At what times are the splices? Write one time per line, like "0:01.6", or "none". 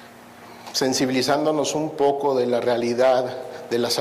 none